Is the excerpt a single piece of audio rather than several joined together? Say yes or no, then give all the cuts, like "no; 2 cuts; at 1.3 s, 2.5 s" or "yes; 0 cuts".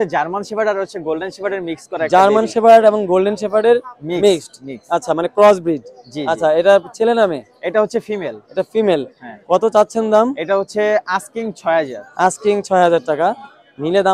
yes; 0 cuts